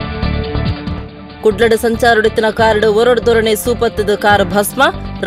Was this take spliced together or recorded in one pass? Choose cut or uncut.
cut